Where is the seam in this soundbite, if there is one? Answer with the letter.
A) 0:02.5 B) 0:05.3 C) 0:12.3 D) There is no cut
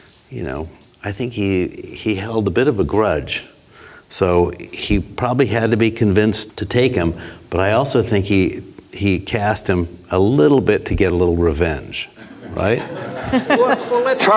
D